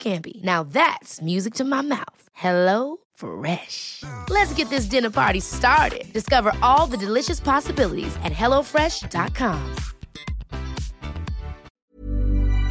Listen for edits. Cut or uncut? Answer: cut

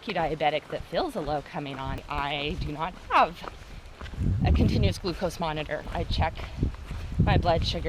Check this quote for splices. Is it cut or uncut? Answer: cut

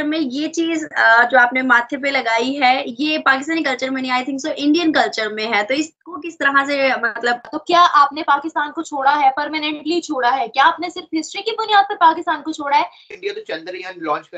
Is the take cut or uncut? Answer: cut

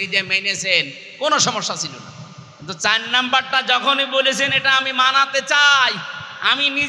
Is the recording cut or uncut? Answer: uncut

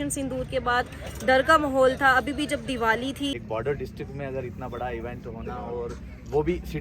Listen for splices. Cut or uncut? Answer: cut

